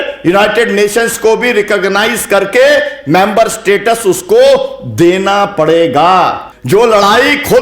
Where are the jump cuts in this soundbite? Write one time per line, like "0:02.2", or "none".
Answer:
0:06.5